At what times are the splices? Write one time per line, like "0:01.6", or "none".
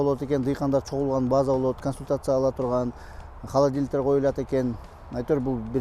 none